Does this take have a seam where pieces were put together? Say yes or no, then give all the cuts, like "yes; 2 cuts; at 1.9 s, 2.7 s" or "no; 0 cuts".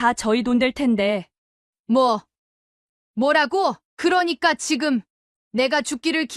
yes; 2 cuts; at 1.3 s, 3.8 s